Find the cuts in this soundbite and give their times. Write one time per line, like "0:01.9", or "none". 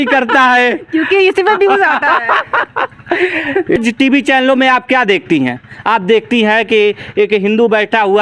0:03.8